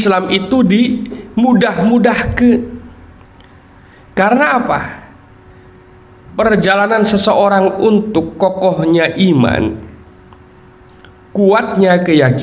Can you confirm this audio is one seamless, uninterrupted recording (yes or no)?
yes